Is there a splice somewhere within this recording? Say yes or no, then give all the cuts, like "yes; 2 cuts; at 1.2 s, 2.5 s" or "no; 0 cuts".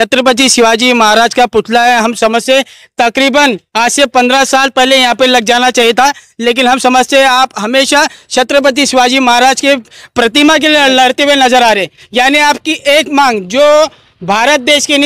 no; 0 cuts